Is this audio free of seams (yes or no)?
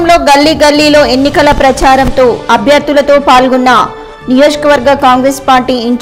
yes